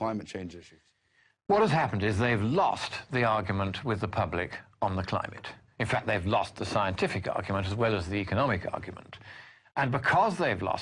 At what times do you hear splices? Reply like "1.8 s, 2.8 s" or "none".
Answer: none